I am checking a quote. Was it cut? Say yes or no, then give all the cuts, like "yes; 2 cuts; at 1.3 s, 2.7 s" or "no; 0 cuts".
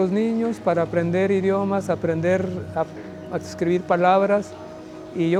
no; 0 cuts